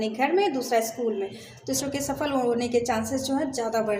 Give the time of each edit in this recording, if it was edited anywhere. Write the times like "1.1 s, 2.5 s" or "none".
1.8 s